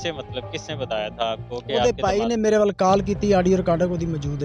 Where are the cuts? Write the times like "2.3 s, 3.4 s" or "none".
none